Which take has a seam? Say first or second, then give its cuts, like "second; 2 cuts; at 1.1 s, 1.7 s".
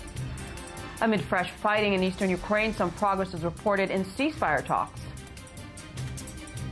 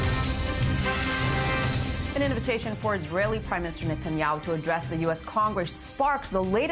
second; 1 cut; at 5.8 s